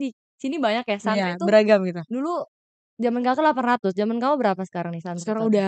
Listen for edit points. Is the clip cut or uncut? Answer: uncut